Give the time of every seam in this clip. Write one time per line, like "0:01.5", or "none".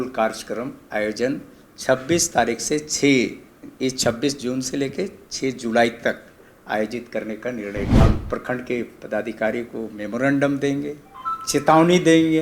0:08.0